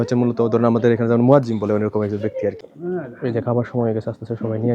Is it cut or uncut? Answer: cut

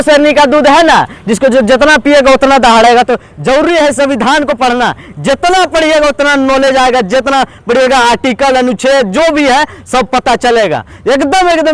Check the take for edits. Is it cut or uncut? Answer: uncut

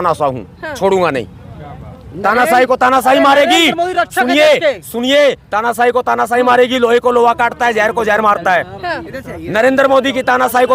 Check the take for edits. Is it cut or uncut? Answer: uncut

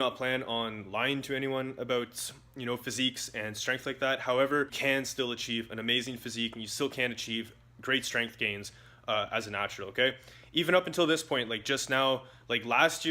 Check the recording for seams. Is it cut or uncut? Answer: cut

